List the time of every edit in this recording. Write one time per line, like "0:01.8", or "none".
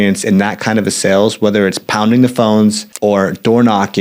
0:02.9